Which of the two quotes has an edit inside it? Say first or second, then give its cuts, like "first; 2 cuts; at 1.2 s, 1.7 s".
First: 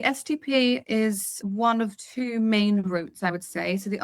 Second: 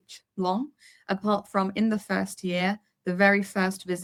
first; 1 cut; at 1.0 s